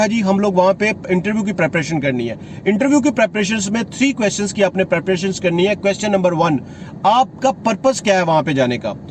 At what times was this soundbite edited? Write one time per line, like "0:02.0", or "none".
none